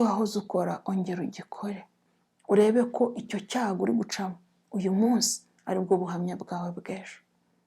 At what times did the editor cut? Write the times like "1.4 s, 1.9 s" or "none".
1.9 s